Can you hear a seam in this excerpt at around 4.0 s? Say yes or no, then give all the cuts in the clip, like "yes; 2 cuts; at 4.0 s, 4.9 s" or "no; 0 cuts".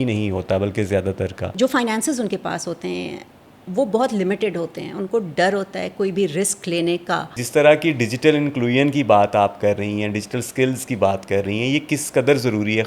no; 2 cuts; at 1.5 s, 7.4 s